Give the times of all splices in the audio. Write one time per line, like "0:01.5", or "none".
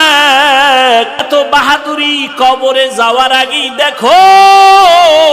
0:01.3